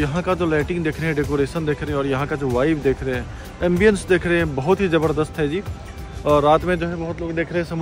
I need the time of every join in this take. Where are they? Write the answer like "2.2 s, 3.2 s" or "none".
none